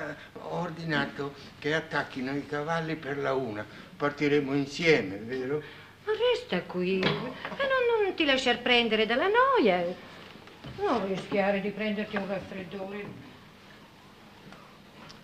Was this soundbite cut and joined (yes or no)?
yes